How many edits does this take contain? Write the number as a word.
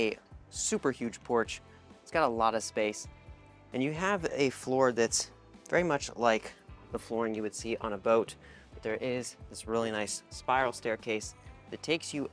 zero